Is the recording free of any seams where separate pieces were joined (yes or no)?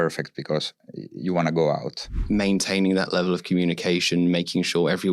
no